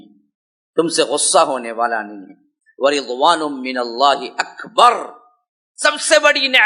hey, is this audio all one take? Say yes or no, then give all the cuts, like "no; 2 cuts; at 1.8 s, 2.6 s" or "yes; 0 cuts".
yes; 0 cuts